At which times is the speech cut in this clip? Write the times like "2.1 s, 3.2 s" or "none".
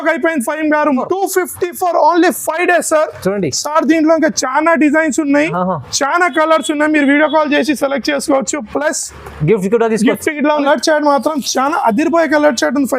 1.0 s, 10.6 s